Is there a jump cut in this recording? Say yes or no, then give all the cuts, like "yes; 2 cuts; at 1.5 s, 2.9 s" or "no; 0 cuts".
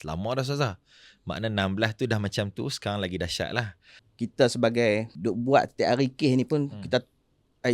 yes; 2 cuts; at 4.0 s, 5.1 s